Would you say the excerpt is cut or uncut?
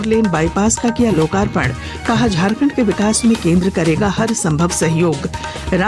uncut